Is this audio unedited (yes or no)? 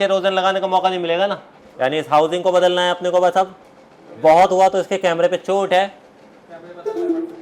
no